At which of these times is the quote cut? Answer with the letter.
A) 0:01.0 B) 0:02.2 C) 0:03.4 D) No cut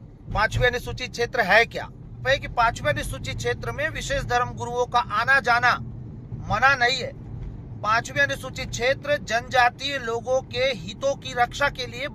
B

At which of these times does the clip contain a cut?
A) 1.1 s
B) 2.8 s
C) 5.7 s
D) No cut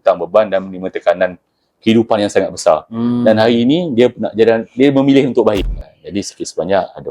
C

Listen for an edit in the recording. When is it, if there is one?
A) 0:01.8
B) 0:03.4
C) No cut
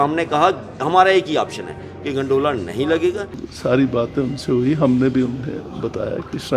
B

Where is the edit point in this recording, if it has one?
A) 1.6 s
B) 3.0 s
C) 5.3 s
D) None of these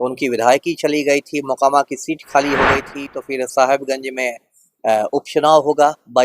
B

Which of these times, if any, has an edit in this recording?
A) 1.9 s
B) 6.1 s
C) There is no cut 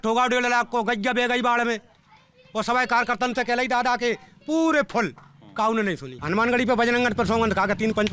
B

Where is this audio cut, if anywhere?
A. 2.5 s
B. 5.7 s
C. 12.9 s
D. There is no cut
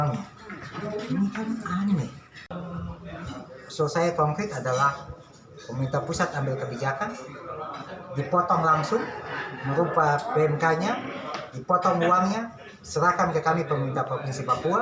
A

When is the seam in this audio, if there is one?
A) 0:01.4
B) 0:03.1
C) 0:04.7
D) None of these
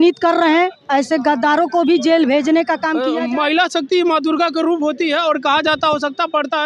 B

